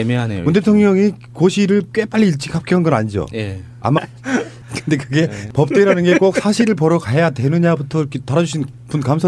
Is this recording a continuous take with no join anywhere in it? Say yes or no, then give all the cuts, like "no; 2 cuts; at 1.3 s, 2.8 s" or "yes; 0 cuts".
yes; 0 cuts